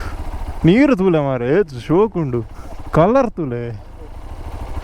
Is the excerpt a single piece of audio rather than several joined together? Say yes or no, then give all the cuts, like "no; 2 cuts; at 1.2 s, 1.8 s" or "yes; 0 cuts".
yes; 0 cuts